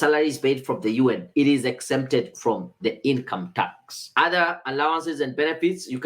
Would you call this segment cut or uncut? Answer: cut